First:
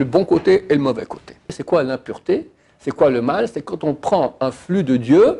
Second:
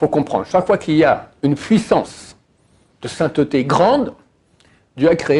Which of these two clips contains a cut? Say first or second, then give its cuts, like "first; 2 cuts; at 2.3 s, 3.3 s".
first; 1 cut; at 1.6 s